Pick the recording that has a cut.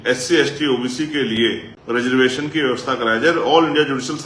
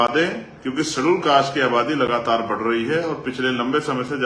first; 1 cut; at 1.7 s

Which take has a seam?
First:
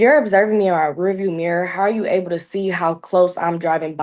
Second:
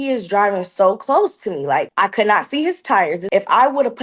second; 2 cuts; at 1.9 s, 3.2 s

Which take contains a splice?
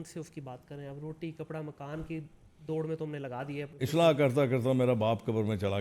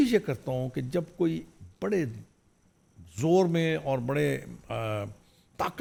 first; 1 cut; at 3.7 s

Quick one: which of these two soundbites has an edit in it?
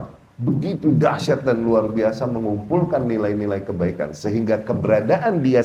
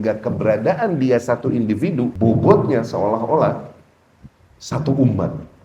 second; 1 cut; at 2.1 s

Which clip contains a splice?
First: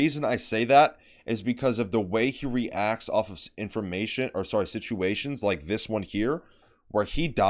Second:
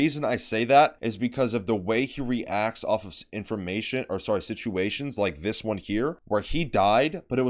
second; 2 cuts; at 1.0 s, 6.2 s

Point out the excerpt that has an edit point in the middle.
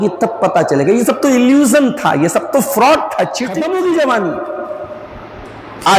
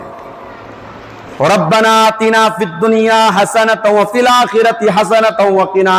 first; 1 cut; at 3.5 s

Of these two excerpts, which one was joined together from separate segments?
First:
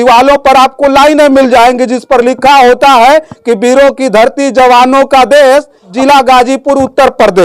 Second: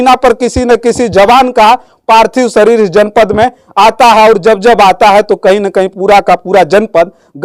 first; 1 cut; at 5.9 s

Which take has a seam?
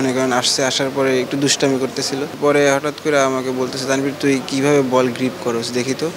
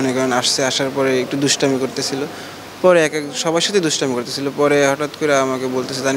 first; 1 cut; at 2.3 s

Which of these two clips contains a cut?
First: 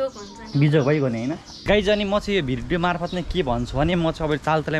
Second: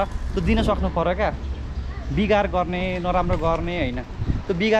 first; 1 cut; at 1.5 s

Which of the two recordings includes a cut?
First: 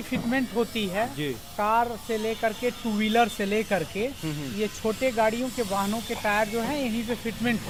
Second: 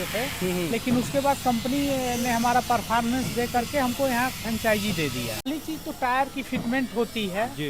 second; 1 cut; at 5.5 s

